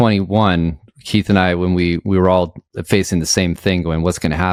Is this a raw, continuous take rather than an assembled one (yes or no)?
yes